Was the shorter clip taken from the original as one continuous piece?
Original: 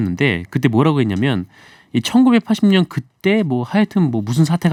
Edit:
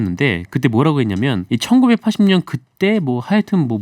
no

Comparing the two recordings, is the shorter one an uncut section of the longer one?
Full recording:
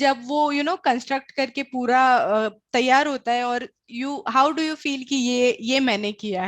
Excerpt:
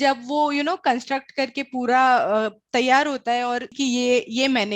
no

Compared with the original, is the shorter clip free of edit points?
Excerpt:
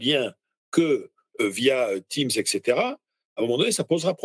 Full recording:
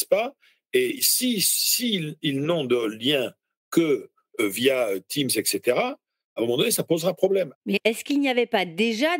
yes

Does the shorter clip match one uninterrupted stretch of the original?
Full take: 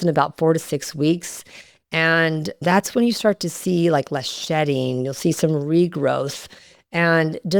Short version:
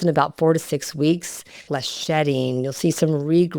no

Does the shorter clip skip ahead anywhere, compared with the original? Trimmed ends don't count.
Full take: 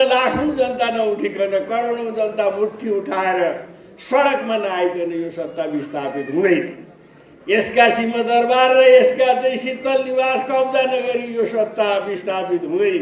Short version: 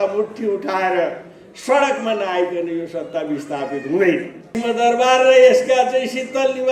yes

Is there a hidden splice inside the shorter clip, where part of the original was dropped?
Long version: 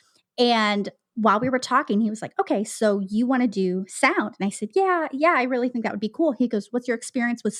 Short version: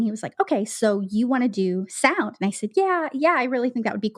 no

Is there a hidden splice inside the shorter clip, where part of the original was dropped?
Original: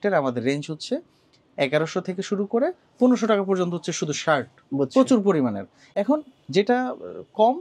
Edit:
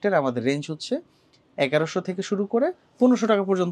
no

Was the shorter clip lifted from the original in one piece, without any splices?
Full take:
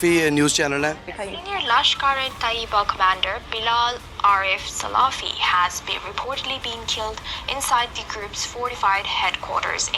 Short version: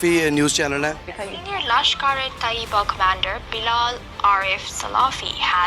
yes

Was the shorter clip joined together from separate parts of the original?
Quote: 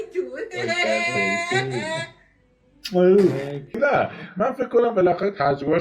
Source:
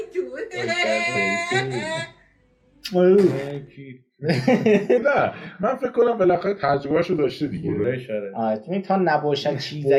yes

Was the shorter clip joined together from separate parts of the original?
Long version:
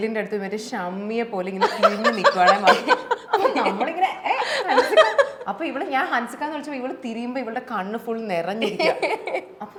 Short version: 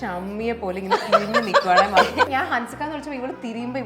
yes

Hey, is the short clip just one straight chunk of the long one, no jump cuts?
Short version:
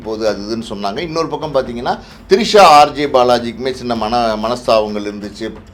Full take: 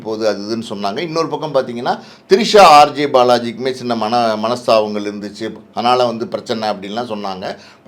yes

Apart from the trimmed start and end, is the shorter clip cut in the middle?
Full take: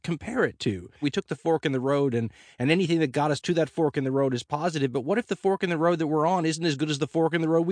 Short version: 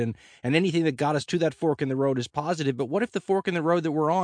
no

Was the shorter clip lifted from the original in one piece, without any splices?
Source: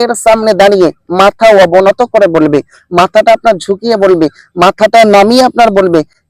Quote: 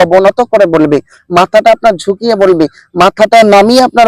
yes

